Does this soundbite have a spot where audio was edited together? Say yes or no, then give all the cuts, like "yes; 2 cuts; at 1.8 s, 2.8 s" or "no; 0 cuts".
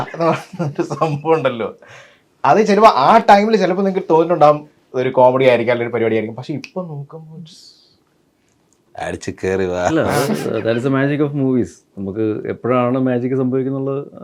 no; 0 cuts